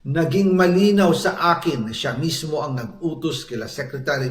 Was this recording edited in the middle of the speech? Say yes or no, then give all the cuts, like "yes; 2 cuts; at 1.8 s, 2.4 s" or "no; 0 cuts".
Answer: no; 0 cuts